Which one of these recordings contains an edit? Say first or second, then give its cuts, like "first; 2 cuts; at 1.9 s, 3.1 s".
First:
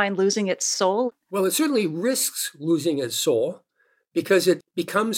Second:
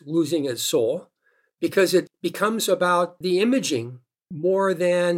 first; 1 cut; at 1.1 s